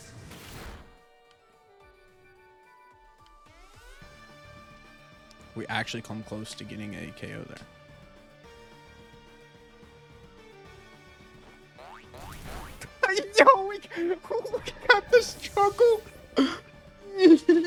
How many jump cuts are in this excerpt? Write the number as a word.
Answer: zero